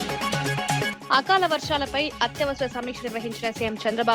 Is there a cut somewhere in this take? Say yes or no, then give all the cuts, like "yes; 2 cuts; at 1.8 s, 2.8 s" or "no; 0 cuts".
yes; 1 cut; at 0.9 s